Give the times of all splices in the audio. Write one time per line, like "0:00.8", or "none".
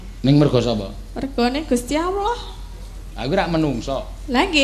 none